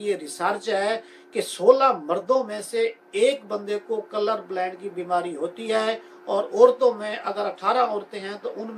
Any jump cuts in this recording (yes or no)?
no